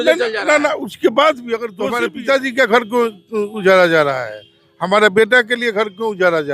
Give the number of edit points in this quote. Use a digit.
1